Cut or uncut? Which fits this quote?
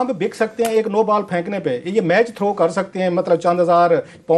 uncut